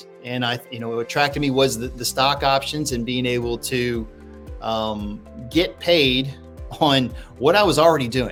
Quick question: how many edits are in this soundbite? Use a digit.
0